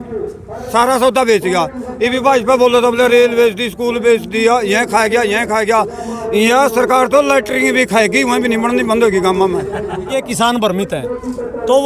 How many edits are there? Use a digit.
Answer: 1